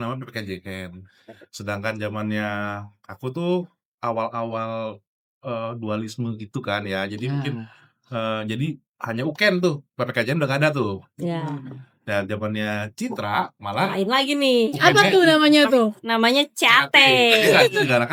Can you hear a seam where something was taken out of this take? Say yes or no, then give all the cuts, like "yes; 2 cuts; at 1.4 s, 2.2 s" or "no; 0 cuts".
no; 0 cuts